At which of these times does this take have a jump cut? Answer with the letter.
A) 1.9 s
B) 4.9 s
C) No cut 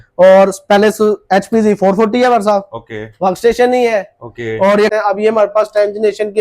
B